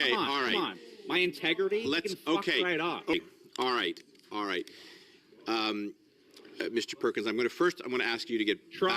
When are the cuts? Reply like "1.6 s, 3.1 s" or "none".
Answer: 3.1 s